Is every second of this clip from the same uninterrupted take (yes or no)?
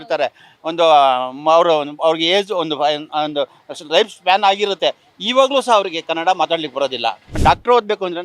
no